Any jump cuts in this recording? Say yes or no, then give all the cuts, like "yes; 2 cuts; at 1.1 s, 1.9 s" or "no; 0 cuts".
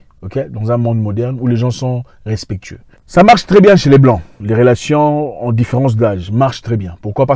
no; 0 cuts